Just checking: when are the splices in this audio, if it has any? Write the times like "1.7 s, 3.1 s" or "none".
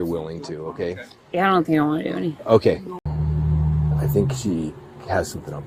2.9 s

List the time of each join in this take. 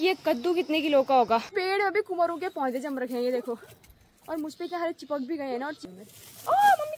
1.5 s, 5.8 s

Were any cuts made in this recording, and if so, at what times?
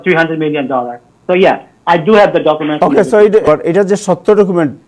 3.4 s

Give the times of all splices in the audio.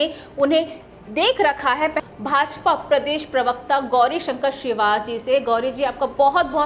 2.0 s

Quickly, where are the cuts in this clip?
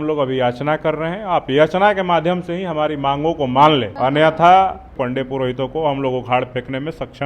3.9 s, 4.9 s

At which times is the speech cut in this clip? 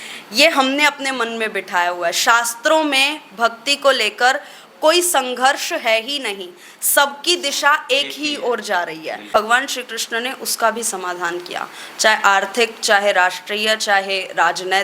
9.3 s

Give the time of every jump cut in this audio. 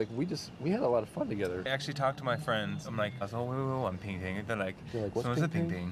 1.7 s

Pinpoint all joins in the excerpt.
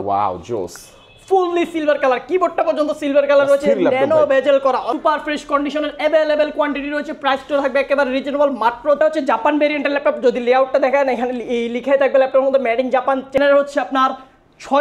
4.9 s, 9.0 s, 13.4 s

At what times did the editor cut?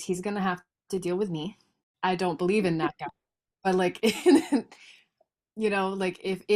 1.8 s

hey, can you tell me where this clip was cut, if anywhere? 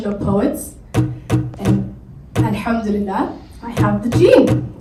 none

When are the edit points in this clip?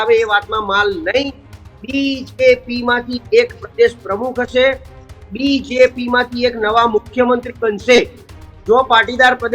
none

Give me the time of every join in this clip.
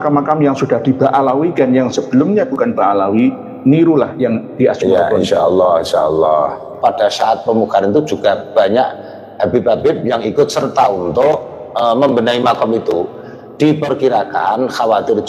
6.8 s

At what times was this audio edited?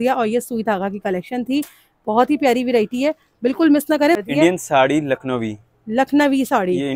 4.2 s

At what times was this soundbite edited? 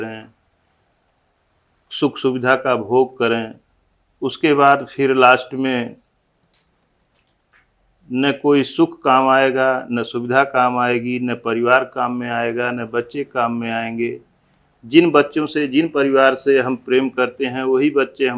none

